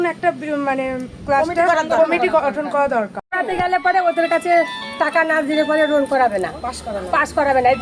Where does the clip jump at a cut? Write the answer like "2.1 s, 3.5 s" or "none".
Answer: 3.2 s